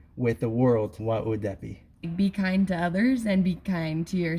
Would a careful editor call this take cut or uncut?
cut